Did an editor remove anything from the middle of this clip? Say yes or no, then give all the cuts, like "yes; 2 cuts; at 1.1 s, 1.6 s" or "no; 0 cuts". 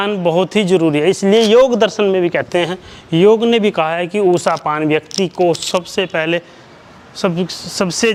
no; 0 cuts